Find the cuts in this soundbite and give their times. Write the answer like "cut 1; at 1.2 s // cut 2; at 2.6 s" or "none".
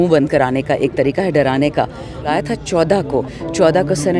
cut 1; at 2.3 s